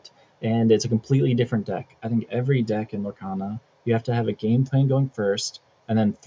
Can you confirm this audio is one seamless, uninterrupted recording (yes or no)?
yes